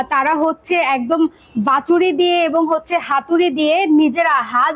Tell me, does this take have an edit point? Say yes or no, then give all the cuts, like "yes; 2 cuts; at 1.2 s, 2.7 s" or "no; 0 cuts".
no; 0 cuts